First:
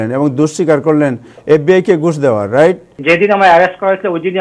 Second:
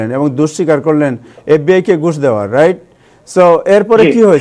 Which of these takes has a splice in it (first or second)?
first